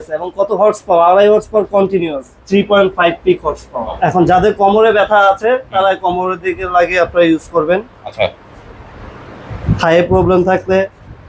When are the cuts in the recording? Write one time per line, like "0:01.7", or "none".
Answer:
0:03.9